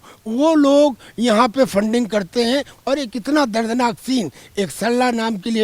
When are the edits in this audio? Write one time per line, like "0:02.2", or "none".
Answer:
0:02.8